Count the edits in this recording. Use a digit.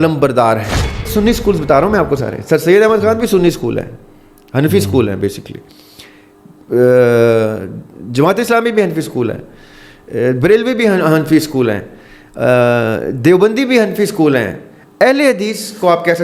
1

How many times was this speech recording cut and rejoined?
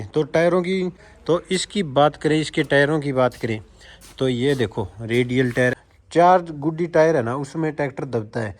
2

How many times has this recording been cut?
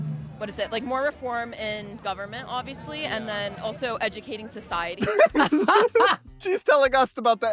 2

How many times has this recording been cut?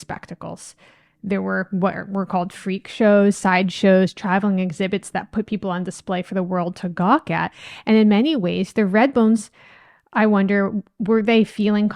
0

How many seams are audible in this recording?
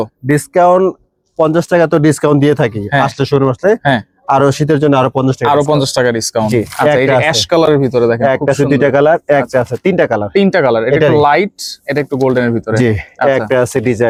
0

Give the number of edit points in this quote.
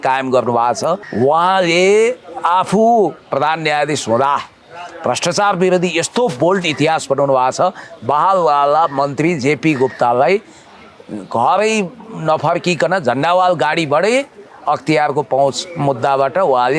1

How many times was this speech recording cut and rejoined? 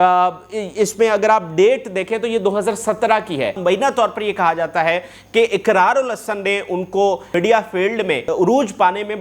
3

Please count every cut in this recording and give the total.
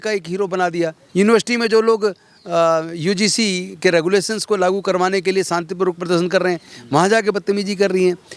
1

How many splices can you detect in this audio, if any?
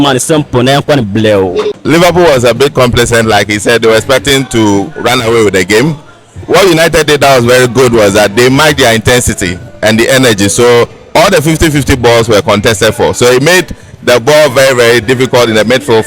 1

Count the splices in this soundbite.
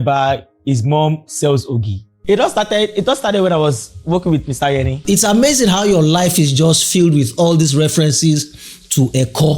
2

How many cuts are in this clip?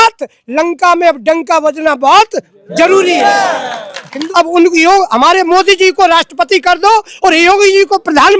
1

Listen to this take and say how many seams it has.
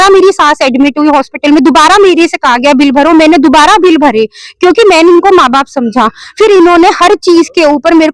0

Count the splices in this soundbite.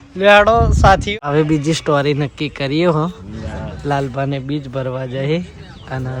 1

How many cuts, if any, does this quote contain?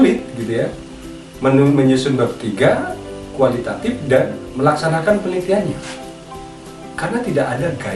0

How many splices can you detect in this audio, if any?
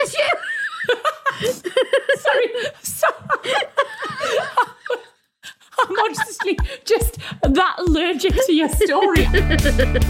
0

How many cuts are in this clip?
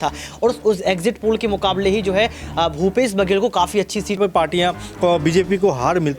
1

